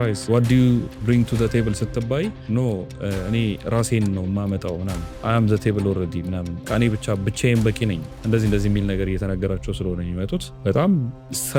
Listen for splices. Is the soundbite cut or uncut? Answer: uncut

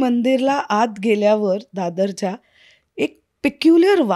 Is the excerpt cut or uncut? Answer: uncut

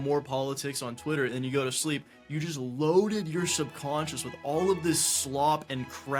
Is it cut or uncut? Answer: uncut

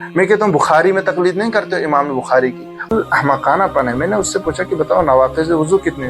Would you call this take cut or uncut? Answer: cut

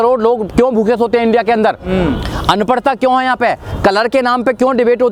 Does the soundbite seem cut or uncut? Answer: uncut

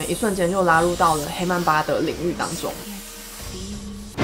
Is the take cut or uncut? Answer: uncut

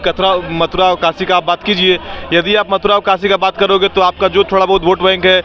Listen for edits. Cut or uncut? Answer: uncut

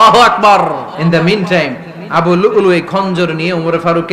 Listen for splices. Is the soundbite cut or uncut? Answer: cut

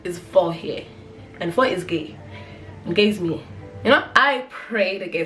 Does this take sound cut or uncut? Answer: cut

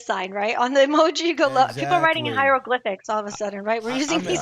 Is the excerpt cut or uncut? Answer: uncut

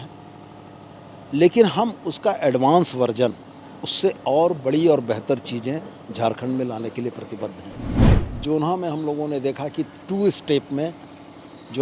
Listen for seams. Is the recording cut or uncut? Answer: cut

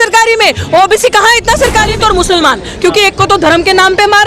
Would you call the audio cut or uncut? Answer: cut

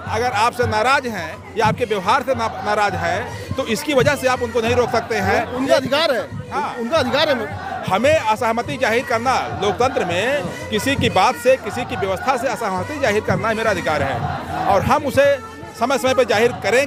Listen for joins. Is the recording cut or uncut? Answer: uncut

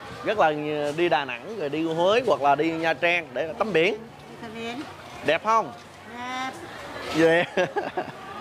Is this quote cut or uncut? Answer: uncut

